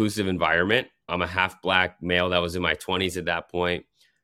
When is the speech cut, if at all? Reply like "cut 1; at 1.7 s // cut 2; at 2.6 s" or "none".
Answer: cut 1; at 1.1 s